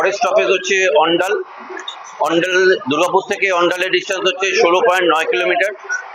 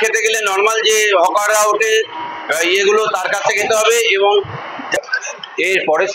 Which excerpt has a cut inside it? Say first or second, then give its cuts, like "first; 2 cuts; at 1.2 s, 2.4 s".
second; 1 cut; at 4.8 s